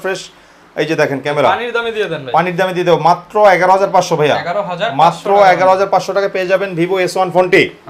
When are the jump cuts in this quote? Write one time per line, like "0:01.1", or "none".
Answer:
none